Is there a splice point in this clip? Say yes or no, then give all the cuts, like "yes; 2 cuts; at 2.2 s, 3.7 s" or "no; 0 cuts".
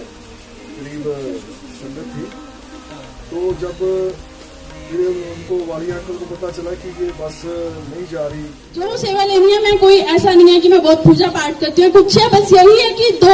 yes; 1 cut; at 9.0 s